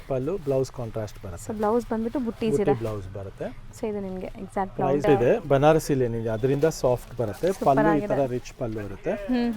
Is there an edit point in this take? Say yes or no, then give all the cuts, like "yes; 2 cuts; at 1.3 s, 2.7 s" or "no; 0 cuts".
yes; 1 cut; at 5.0 s